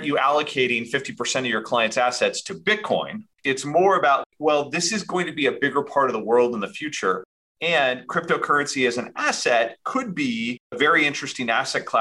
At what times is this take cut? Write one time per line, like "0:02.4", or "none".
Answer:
0:03.2
0:04.2